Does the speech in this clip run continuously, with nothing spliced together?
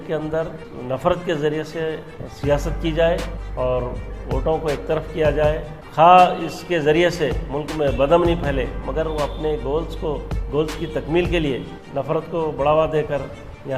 yes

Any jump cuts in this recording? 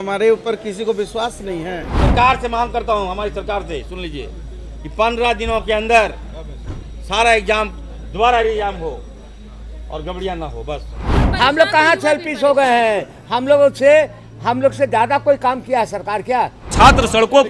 yes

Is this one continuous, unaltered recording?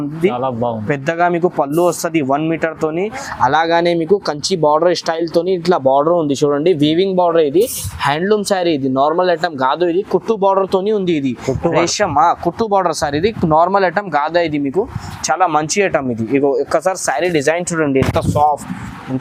yes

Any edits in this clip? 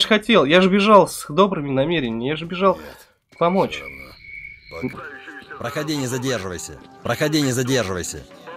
yes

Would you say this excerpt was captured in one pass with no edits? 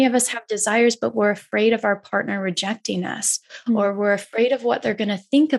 yes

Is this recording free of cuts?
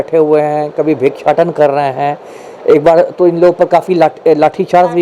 yes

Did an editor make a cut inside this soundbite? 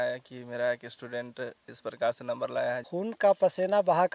yes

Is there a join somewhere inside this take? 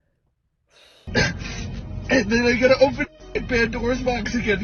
yes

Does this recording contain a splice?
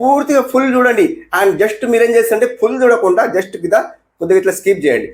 no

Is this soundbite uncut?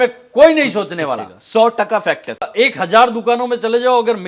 no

